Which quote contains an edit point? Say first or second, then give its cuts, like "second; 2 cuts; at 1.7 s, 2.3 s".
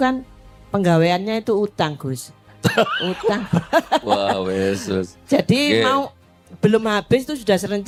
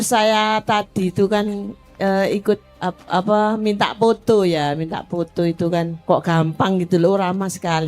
second; 2 cuts; at 2.7 s, 6.0 s